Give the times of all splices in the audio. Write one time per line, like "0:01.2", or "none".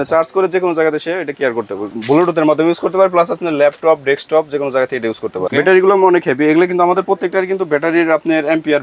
0:01.9
0:05.5

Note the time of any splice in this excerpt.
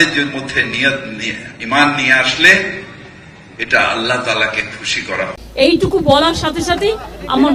0:05.7

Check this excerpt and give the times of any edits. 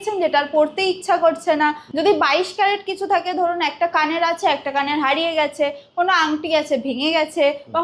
0:01.8

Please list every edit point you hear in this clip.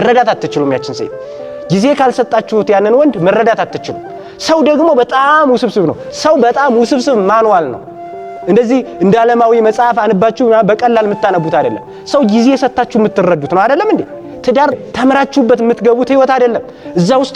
0:14.8

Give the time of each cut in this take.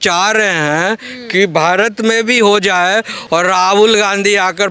0:03.2

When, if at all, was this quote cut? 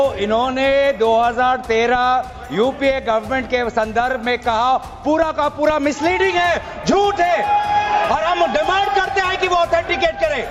none

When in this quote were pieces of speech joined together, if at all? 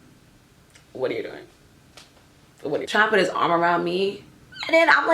0:02.9

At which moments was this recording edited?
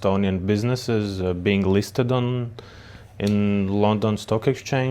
none

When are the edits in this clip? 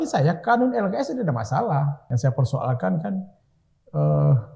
0:02.0

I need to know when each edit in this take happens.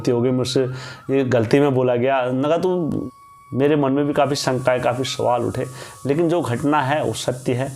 0:03.0

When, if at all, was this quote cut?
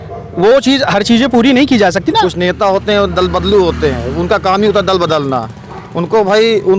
0:02.2

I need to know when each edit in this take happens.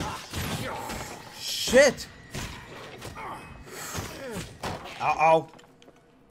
none

